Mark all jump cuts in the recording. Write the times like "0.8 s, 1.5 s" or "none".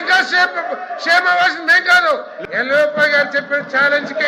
2.3 s